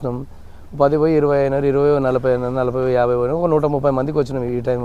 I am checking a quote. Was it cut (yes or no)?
no